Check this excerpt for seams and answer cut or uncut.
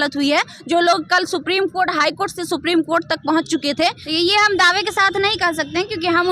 cut